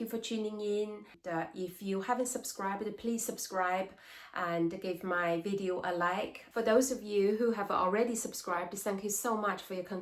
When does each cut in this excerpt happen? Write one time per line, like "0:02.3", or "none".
none